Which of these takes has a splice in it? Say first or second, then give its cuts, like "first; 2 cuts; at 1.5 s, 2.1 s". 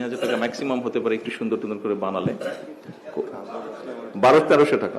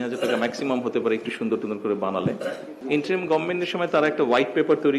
second; 1 cut; at 2.8 s